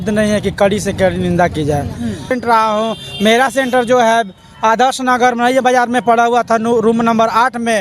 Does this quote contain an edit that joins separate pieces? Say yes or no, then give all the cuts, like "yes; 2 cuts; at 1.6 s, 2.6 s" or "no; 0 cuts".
yes; 1 cut; at 2.3 s